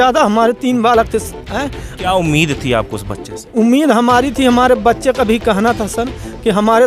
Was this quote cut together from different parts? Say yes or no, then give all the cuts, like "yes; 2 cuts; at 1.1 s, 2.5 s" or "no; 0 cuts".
no; 0 cuts